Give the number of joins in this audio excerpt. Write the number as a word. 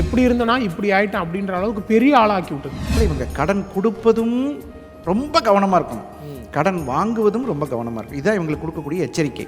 one